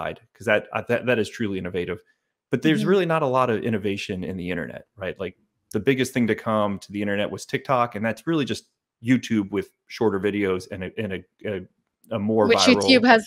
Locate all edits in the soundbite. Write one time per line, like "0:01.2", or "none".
none

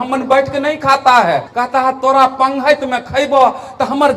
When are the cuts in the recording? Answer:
0:01.5

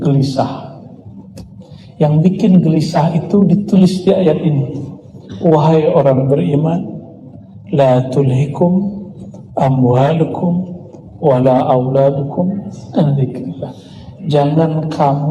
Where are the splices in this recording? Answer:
none

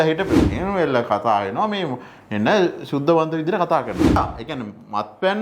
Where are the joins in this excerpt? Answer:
0:04.2

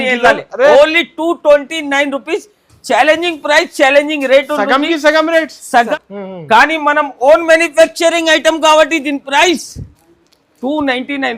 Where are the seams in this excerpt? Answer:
0:05.9

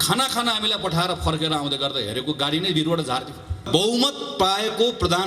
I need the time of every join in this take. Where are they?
0:03.6

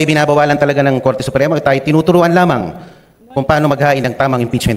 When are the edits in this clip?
none

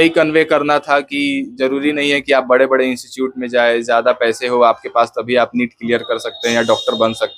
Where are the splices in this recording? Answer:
none

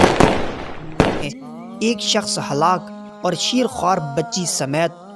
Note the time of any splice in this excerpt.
0:01.2

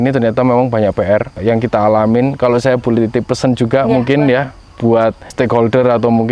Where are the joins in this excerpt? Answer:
0:01.3
0:05.2

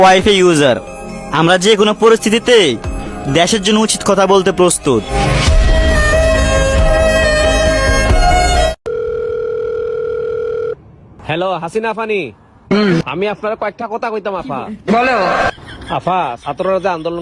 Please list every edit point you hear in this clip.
0:08.8

